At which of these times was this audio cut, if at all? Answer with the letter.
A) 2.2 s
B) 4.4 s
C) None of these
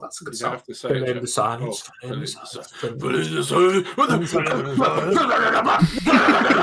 C